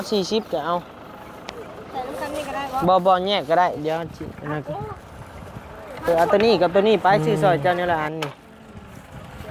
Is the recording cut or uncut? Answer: cut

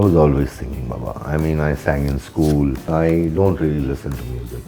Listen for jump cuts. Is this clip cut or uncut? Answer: cut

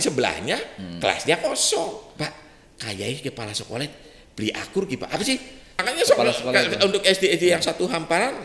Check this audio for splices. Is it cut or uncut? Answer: cut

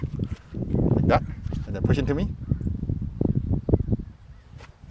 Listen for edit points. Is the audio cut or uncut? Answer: uncut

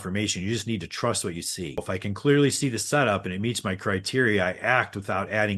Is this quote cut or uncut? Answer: uncut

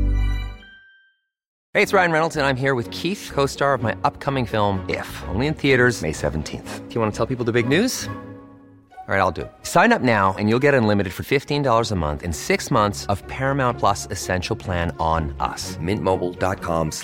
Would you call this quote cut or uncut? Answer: cut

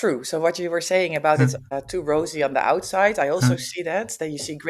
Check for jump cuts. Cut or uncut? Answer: cut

